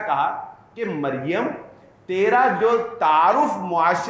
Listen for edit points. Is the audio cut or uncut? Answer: uncut